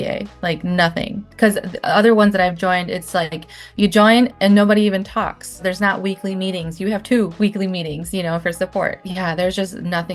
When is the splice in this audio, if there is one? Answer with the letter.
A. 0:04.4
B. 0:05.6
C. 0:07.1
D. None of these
B